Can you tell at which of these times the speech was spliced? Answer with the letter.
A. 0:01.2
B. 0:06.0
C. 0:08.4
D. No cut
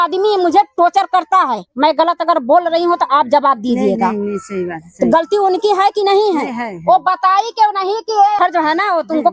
C